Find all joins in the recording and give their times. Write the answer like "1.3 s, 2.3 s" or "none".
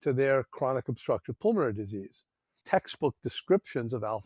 2.6 s